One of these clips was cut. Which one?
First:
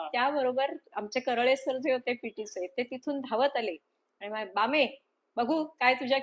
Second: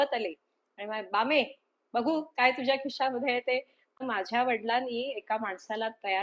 second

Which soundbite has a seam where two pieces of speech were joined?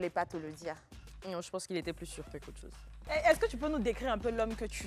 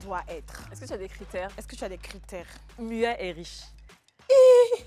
first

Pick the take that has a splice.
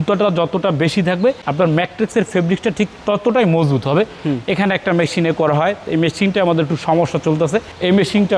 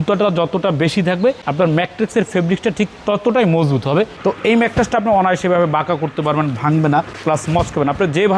second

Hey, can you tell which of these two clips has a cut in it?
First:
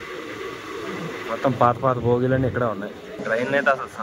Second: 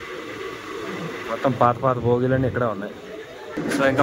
first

